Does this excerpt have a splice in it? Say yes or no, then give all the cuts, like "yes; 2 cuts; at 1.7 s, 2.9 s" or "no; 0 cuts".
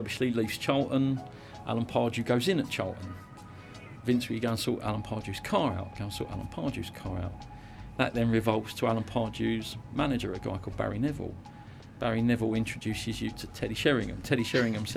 no; 0 cuts